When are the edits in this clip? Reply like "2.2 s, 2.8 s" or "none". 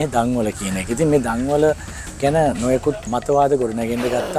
3.0 s

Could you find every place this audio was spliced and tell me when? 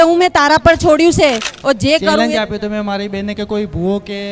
2.2 s

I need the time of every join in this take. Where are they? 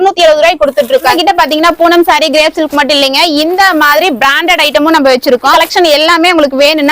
1.1 s, 5.5 s

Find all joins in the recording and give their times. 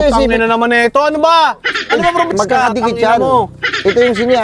2.3 s

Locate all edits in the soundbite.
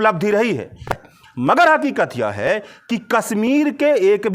1.0 s

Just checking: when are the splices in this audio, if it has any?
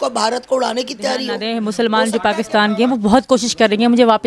1.4 s

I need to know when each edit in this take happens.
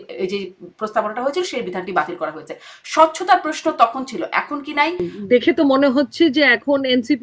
5.1 s

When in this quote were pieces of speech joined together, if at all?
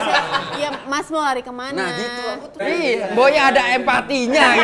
2.6 s

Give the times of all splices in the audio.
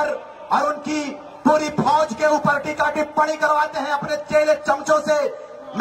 none

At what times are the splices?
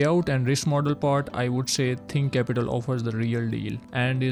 none

